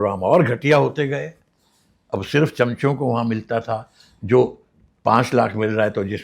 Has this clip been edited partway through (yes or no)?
no